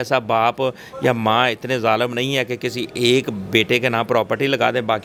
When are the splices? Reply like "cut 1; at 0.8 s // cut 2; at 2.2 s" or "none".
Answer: none

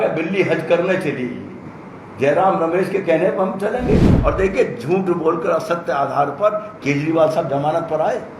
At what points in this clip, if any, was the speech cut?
cut 1; at 4.1 s

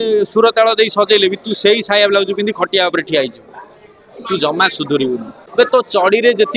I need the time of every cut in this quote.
cut 1; at 5.4 s

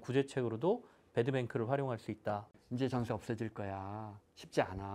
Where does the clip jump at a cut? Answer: cut 1; at 2.5 s

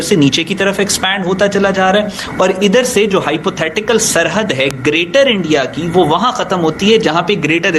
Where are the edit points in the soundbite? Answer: none

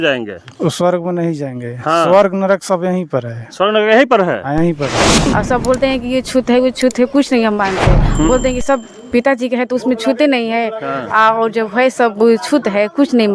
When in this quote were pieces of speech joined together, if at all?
cut 1; at 5.3 s

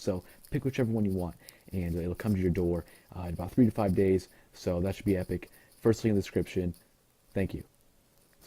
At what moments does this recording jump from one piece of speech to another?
cut 1; at 5.2 s

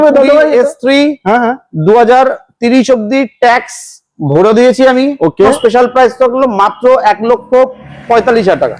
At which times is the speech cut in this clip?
cut 1; at 5.6 s

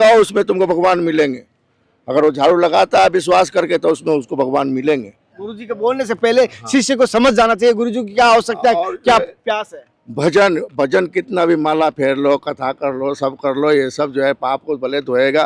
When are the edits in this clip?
none

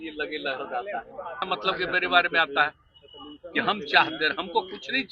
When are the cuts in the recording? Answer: cut 1; at 1.4 s

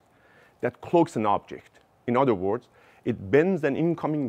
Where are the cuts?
none

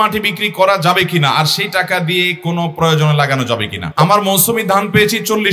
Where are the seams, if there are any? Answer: cut 1; at 3.8 s

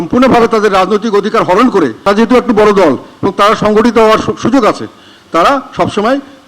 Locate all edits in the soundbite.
cut 1; at 2.1 s

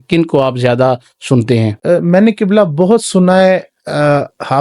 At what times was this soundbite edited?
cut 1; at 1.8 s

